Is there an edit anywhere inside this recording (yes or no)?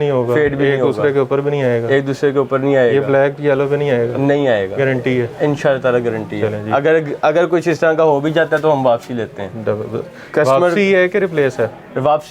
no